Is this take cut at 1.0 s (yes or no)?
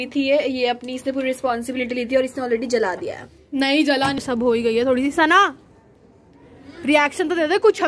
no